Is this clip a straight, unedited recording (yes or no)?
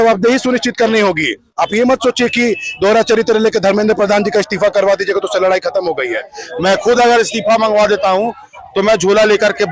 no